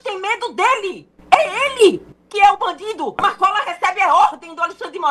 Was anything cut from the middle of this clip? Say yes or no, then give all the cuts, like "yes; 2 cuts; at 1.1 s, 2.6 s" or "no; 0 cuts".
yes; 1 cut; at 3.2 s